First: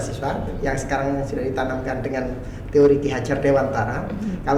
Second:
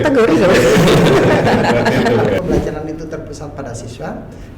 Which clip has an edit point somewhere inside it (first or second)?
second